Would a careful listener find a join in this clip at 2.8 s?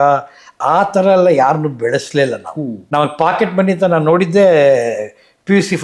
yes; 1 cut; at 2.8 s

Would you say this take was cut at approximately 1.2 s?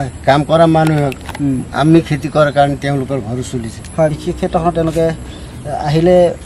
no; 1 cut; at 4.2 s

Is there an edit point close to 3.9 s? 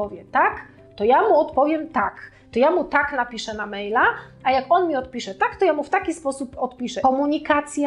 no; 1 cut; at 6.9 s

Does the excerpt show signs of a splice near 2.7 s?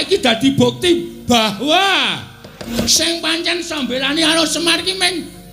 yes; 1 cut; at 2.7 s

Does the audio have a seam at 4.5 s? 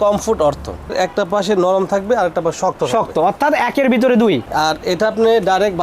yes; 2 cuts; at 1.0 s, 4.5 s

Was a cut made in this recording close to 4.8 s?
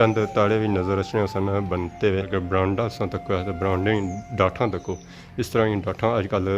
no; 1 cut; at 2.3 s

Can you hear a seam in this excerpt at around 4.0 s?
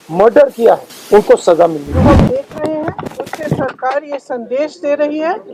no; 2 cuts; at 0.9 s, 2.1 s

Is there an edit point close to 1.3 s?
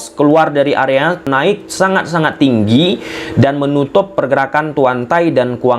yes; 1 cut; at 1.3 s

